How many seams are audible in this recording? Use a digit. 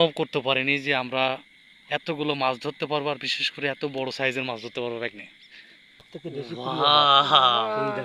1